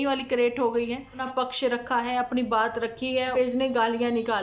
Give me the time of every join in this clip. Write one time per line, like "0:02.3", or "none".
0:01.2
0:03.3